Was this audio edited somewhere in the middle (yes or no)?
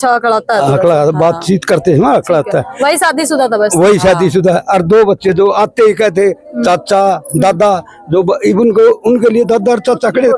no